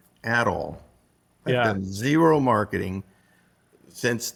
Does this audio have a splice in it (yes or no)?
no